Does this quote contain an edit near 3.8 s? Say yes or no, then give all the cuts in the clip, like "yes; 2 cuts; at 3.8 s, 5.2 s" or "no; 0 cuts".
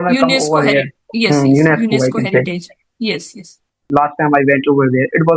yes; 1 cut; at 3.8 s